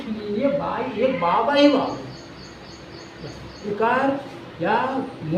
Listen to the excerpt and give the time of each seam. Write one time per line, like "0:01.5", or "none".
0:03.7